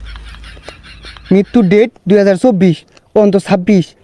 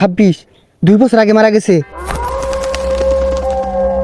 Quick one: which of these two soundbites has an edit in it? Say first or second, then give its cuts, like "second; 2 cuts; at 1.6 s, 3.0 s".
second; 1 cut; at 1.9 s